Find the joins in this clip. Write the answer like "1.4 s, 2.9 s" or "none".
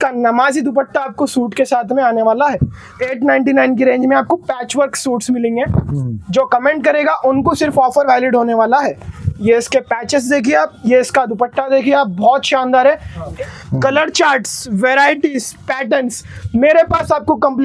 3.0 s, 13.3 s

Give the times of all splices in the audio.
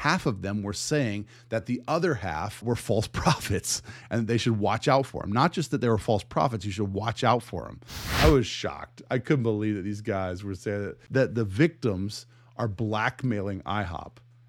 2.6 s, 8.1 s, 11.0 s

